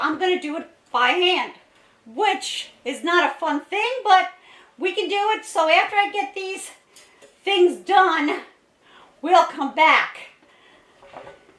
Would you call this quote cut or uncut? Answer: uncut